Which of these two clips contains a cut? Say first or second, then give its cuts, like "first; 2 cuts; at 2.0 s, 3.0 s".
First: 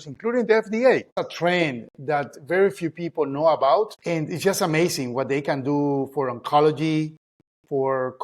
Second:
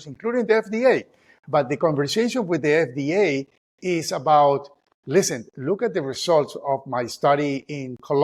first; 2 cuts; at 1.2 s, 4.0 s